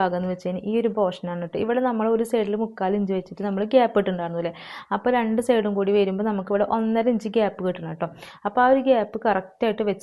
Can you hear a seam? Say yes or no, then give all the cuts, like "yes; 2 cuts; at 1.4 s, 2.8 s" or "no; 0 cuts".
no; 0 cuts